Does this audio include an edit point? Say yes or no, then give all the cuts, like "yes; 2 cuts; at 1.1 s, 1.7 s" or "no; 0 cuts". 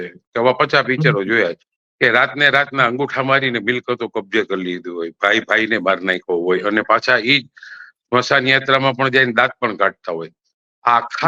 no; 0 cuts